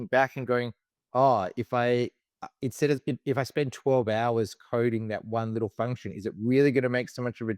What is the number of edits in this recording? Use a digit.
0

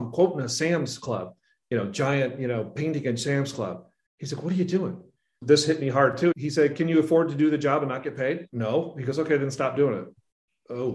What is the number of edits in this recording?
2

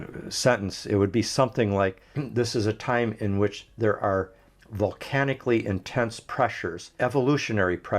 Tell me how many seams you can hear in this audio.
2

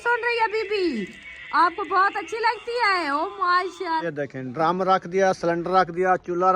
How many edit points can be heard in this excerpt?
1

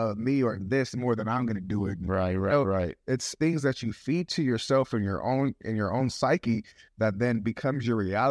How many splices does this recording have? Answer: 1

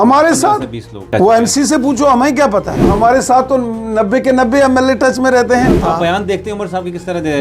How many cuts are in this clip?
3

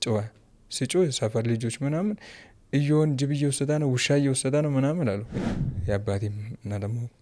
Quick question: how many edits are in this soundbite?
1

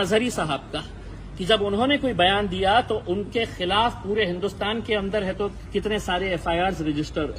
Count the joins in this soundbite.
0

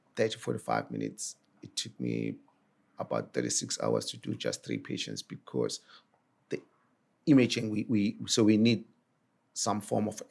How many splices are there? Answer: 2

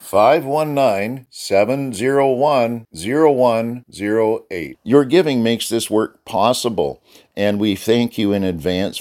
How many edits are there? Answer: 0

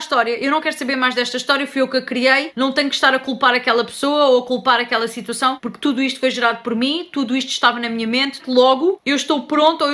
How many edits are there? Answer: 1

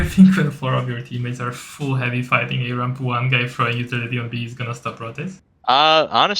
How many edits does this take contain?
1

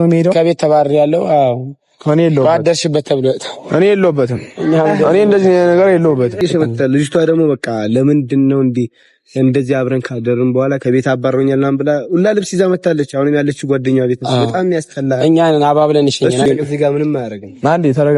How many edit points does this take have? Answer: 2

